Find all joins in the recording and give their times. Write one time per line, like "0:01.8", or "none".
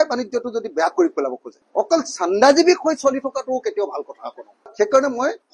0:01.5
0:04.6